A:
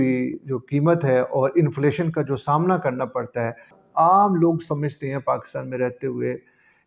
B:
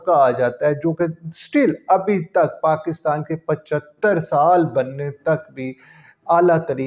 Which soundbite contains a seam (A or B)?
A